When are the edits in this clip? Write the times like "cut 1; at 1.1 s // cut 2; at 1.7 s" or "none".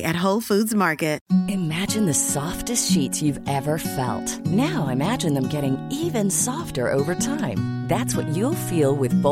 cut 1; at 1.2 s